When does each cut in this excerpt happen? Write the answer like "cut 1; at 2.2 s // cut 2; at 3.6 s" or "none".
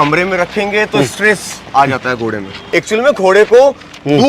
cut 1; at 2.6 s